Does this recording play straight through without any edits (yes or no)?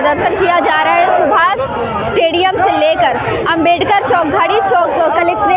yes